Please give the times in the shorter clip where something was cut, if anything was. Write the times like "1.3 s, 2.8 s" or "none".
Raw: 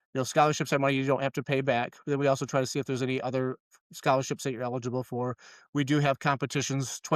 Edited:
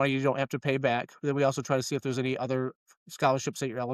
none